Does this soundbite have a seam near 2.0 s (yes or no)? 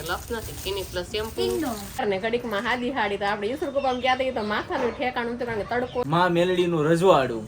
yes